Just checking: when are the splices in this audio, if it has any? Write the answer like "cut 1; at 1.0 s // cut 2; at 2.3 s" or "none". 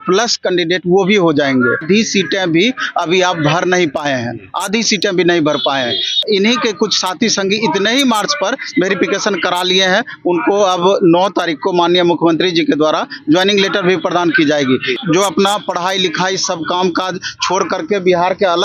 cut 1; at 1.8 s // cut 2; at 6.2 s // cut 3; at 15.0 s